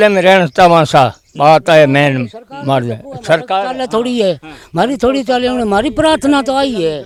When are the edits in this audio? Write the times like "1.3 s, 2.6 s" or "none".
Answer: none